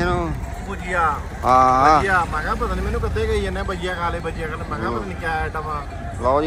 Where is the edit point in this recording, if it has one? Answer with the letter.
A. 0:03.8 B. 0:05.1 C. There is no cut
C